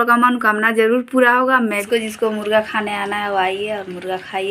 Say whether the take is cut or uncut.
cut